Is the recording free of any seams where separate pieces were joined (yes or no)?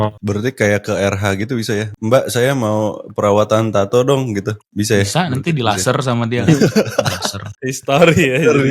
no